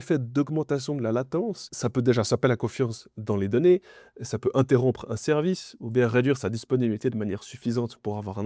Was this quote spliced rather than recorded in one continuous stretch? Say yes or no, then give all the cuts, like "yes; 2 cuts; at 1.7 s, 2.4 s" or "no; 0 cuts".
yes; 1 cut; at 1.6 s